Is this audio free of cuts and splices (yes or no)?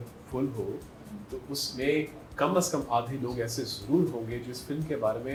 yes